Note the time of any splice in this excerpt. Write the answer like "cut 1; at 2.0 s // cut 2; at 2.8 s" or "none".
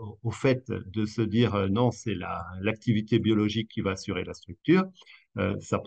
none